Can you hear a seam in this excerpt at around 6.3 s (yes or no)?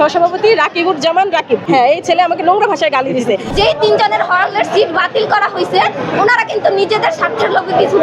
no